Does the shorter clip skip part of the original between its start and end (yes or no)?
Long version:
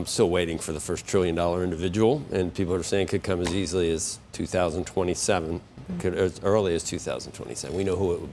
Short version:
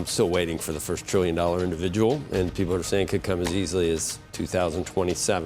no